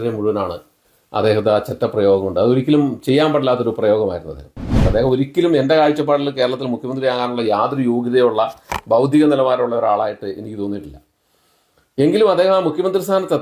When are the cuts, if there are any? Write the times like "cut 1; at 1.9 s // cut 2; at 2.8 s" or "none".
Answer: cut 1; at 4.8 s